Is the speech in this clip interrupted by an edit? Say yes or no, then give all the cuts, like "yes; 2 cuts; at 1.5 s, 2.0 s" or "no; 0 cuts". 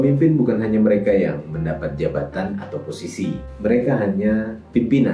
yes; 1 cut; at 3.5 s